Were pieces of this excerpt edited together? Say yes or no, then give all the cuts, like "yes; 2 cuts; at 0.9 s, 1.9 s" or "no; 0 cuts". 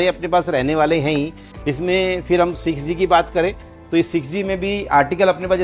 no; 0 cuts